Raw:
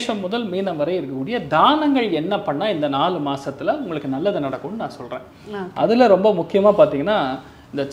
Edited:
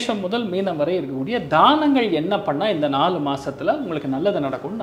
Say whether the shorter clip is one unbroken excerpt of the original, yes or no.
yes